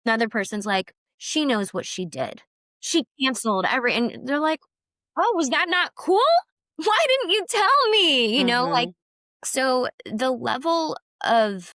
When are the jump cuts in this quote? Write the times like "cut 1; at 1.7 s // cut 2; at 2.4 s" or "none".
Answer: cut 1; at 2.9 s // cut 2; at 6.6 s